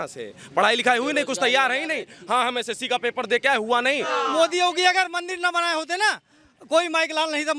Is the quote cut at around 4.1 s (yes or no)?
yes